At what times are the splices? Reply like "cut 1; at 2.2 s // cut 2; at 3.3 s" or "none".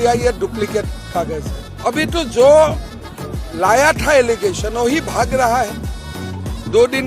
cut 1; at 1.6 s